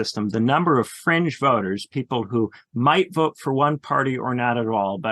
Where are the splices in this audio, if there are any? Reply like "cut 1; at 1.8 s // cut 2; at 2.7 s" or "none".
cut 1; at 2.6 s